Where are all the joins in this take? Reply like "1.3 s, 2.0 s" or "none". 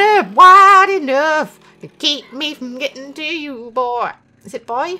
none

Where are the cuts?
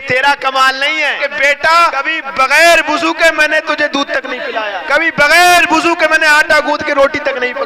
1.2 s, 2.0 s, 4.8 s

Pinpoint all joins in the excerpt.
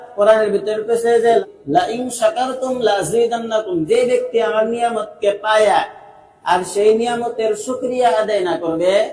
1.4 s

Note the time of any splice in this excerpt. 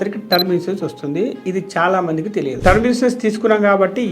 2.6 s

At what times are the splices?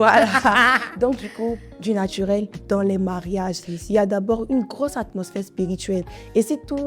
2.6 s

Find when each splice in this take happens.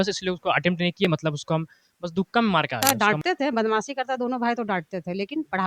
2.8 s

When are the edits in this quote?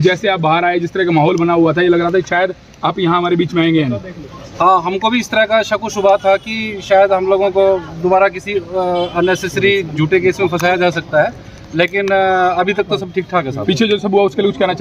none

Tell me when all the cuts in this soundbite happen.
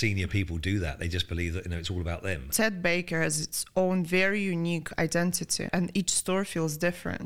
2.5 s, 5.7 s

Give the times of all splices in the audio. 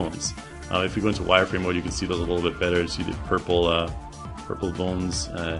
1.6 s

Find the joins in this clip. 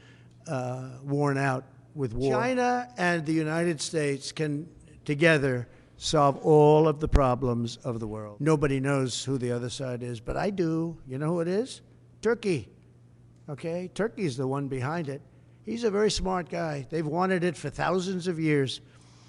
2.4 s, 8.2 s

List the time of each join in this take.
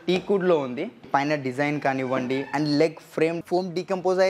1.1 s, 3.4 s

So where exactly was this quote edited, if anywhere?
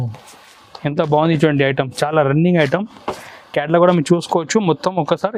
none

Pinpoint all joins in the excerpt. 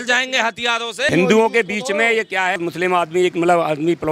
1.1 s, 2.5 s

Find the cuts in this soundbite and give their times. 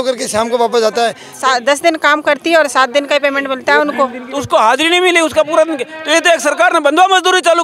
1.2 s, 4.3 s

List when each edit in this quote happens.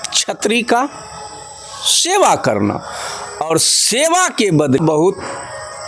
4.8 s

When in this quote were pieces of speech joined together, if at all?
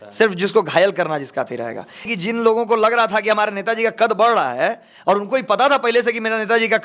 2.1 s

